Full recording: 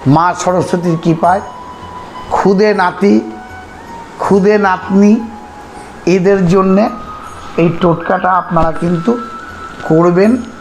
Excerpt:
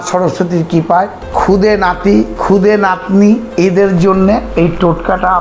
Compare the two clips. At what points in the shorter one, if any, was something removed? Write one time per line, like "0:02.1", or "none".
0:01.2
0:02.4
0:03.5
0:04.5